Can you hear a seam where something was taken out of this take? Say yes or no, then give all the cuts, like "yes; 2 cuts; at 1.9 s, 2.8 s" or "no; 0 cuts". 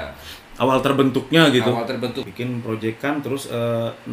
yes; 1 cut; at 2.3 s